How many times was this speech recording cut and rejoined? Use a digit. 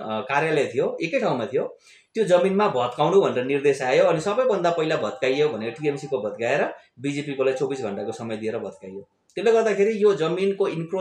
0